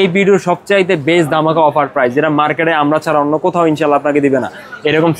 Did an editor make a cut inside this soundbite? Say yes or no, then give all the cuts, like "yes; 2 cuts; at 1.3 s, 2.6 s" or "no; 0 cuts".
no; 0 cuts